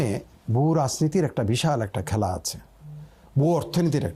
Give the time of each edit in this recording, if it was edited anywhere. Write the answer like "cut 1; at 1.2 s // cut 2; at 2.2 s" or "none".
none